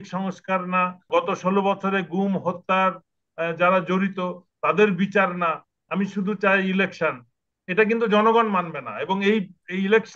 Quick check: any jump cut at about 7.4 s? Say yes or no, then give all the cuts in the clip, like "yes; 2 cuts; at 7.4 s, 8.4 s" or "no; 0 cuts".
no; 1 cut; at 1.1 s